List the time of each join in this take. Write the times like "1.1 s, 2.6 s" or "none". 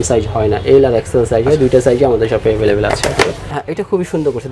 3.5 s